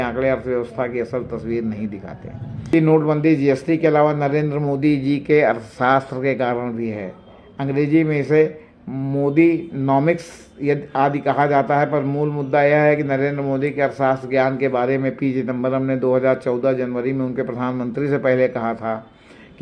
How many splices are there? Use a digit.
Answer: 1